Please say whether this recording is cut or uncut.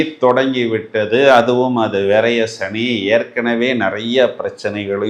uncut